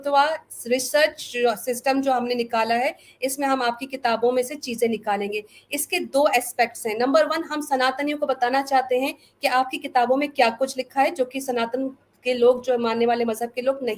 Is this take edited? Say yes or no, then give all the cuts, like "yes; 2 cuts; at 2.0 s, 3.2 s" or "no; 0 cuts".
no; 0 cuts